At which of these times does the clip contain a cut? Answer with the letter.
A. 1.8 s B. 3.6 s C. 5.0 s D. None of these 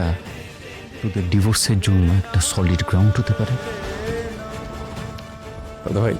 B